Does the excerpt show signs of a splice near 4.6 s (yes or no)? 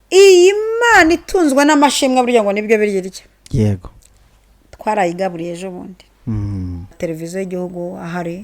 no